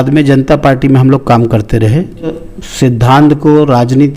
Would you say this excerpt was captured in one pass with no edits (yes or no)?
no